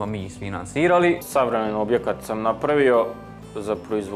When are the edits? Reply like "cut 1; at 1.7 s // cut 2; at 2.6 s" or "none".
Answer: cut 1; at 1.2 s